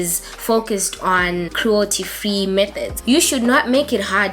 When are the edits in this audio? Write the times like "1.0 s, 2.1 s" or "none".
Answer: 2.9 s